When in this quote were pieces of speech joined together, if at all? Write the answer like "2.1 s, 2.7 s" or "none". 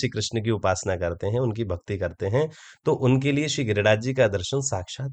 none